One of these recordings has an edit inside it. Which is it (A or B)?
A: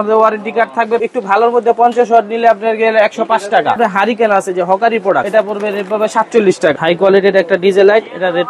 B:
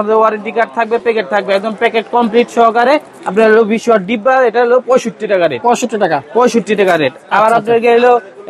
A